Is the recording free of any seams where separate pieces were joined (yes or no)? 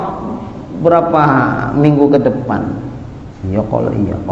yes